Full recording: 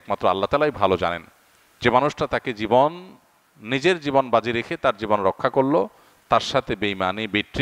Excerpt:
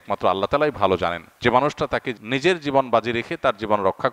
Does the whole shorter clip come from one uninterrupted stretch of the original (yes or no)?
no